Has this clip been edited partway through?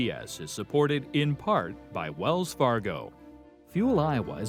no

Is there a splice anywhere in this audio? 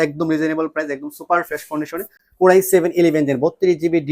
no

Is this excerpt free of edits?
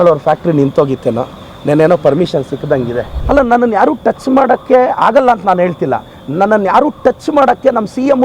no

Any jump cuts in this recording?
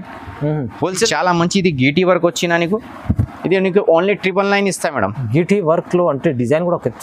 yes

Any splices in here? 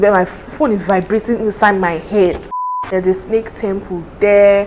yes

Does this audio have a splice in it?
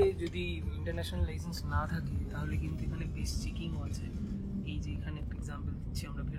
no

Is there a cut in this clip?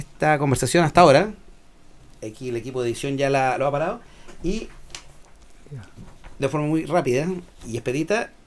no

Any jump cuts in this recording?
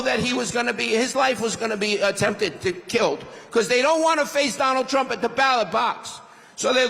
no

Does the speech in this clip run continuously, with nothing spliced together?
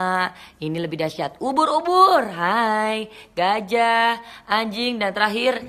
yes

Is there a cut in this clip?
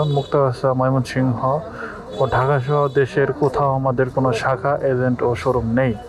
no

